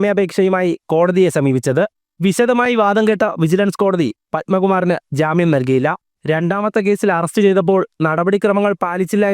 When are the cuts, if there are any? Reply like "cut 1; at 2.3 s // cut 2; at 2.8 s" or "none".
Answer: cut 1; at 2.0 s // cut 2; at 6.1 s